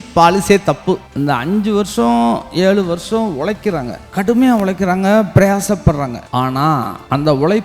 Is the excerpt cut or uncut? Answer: cut